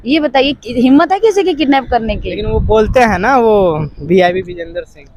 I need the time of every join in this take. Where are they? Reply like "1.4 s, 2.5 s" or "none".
none